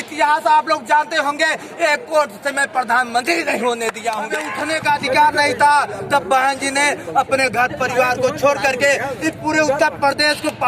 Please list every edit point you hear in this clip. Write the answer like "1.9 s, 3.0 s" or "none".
4.5 s